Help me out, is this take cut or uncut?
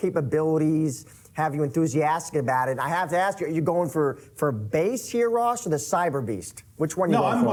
uncut